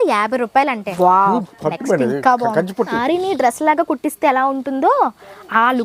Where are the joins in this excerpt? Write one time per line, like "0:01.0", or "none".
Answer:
0:00.9
0:02.9